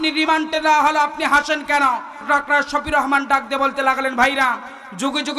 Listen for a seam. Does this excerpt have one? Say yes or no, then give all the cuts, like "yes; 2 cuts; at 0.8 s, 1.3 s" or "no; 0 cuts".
yes; 1 cut; at 2.2 s